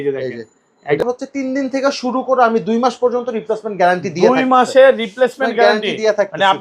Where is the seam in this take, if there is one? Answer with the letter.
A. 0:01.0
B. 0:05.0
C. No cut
A